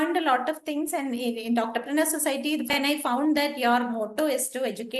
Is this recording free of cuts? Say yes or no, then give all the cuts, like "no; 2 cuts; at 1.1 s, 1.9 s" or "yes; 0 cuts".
no; 1 cut; at 2.7 s